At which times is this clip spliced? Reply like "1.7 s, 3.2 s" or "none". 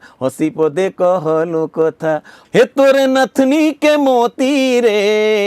2.3 s